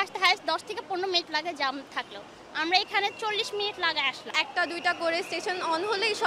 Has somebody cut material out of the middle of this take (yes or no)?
yes